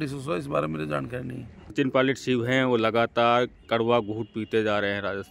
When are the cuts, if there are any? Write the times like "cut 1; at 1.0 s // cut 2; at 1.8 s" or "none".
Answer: cut 1; at 1.7 s